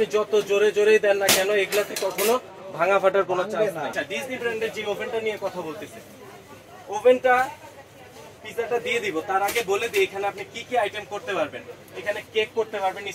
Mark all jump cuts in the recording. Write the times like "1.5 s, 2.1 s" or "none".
3.9 s